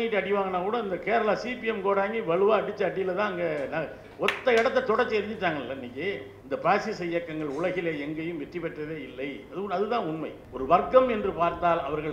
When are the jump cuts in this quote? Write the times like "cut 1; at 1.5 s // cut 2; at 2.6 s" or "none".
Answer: cut 1; at 6.3 s // cut 2; at 10.4 s